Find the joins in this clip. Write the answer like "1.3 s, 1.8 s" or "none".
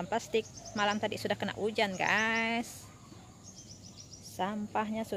none